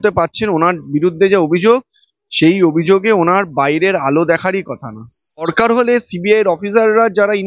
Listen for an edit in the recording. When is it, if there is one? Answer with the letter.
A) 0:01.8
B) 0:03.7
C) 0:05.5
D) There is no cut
C